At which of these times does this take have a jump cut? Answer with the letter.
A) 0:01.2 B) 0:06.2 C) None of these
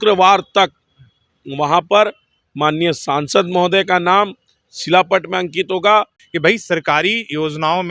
B